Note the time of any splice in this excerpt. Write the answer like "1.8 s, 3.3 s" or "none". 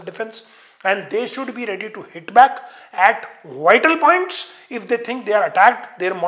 none